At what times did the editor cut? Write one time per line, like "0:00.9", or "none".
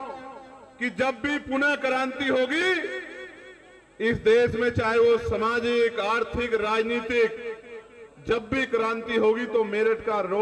none